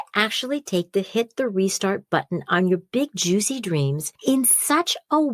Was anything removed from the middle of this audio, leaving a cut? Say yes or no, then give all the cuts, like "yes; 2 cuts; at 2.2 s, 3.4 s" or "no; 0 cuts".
yes; 1 cut; at 4.1 s